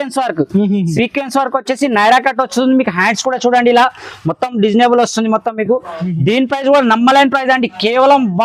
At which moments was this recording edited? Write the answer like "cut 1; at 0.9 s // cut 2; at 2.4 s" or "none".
none